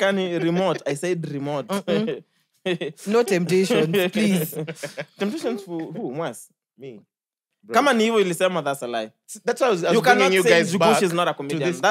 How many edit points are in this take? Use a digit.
1